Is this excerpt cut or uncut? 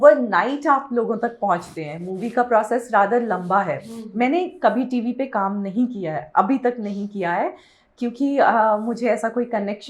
uncut